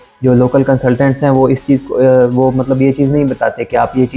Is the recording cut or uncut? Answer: uncut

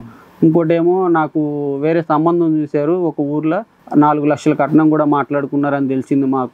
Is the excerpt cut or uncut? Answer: uncut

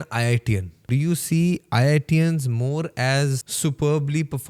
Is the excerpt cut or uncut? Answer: cut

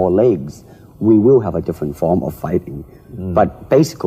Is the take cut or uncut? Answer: cut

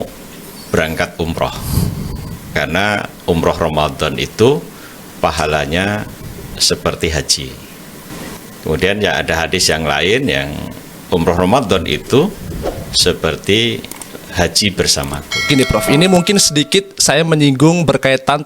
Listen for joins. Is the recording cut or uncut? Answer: cut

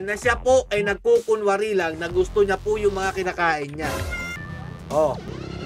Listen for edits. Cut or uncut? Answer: cut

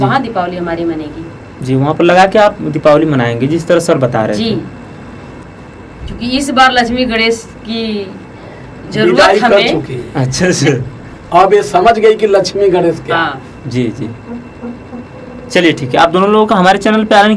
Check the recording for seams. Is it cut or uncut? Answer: uncut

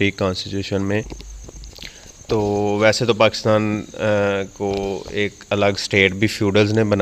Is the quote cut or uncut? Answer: cut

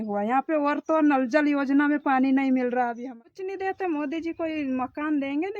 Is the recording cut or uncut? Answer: cut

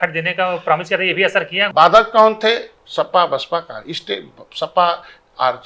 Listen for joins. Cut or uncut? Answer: cut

